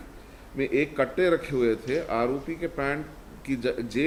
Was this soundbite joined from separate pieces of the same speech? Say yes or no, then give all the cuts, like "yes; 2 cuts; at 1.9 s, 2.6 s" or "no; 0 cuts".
no; 0 cuts